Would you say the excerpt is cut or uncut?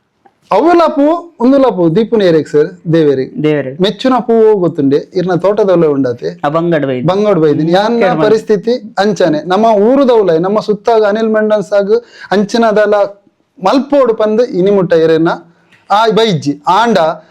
uncut